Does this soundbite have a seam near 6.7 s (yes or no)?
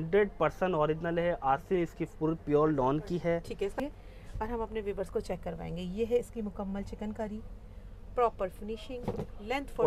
no